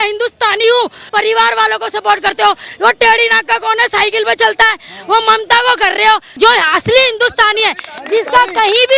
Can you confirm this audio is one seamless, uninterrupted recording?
no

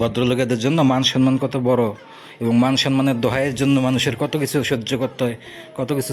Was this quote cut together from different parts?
no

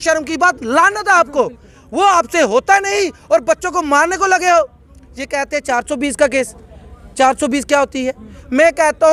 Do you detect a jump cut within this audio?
no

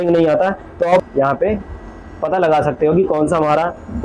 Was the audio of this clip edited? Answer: yes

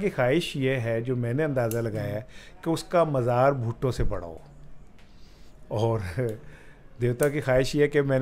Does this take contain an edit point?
no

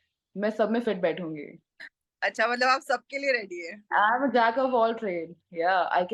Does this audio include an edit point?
no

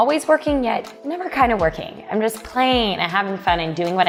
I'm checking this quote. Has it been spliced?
no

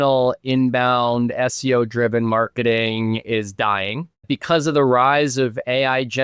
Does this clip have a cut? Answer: yes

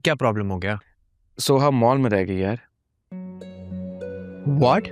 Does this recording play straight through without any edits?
yes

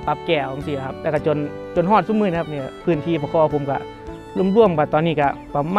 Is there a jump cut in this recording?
no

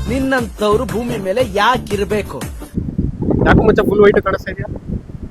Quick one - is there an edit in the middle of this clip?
no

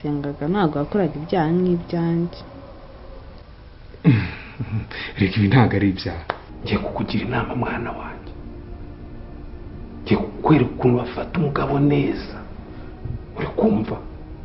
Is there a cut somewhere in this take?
yes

